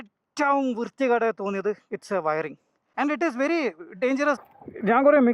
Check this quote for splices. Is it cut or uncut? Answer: cut